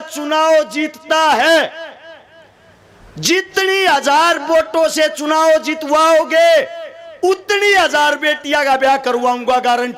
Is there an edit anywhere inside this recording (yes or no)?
no